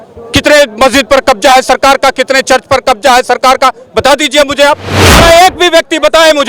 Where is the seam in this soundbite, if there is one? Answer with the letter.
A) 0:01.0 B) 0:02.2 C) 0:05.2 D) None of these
C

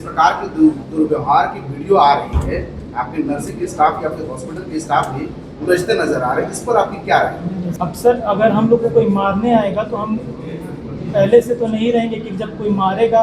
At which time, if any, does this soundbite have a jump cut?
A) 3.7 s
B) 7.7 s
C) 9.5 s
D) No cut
B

